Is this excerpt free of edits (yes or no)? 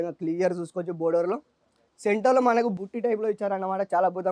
yes